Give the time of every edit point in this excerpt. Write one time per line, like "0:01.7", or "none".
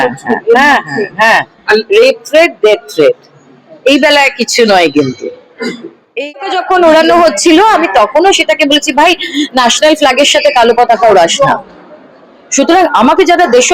0:06.4